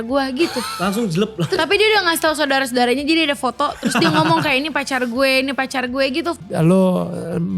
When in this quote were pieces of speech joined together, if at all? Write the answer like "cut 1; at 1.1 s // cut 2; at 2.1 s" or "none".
cut 1; at 1.6 s // cut 2; at 6.4 s